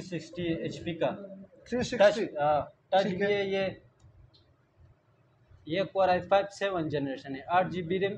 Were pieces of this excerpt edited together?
no; 0 cuts

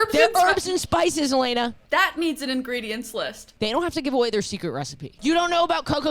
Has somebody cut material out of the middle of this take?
yes; 3 cuts; at 1.8 s, 3.4 s, 5.1 s

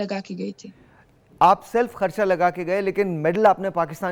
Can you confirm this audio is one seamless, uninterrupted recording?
yes; 0 cuts

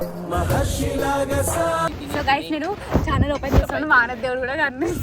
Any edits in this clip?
yes; 1 cut; at 2.0 s

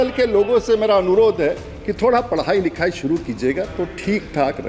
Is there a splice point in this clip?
no; 0 cuts

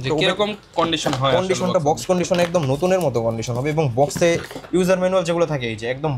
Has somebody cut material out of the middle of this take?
no; 0 cuts

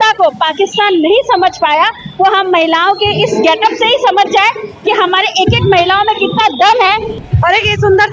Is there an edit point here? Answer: yes; 1 cut; at 7.2 s

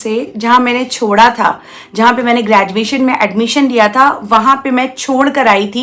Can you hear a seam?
no; 0 cuts

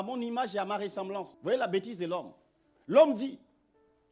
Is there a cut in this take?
yes; 1 cut; at 1.3 s

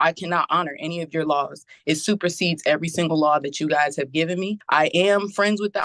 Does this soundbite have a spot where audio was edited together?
yes; 1 cut; at 4.6 s

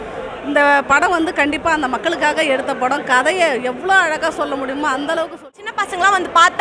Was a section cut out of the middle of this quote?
yes; 1 cut; at 5.6 s

